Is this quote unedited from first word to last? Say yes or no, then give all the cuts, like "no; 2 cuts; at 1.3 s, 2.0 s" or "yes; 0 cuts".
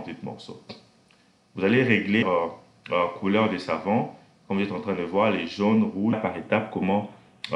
no; 2 cuts; at 2.2 s, 6.1 s